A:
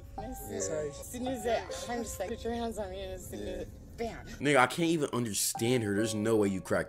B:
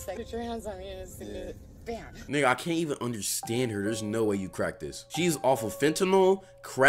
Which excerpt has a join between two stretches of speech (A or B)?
A